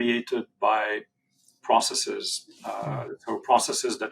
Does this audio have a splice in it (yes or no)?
no